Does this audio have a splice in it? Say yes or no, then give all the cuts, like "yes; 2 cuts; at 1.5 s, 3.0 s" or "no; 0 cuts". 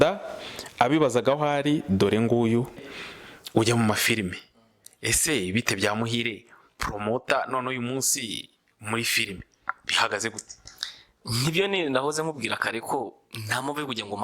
yes; 1 cut; at 2.8 s